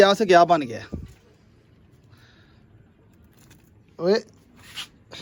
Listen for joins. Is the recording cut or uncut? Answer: uncut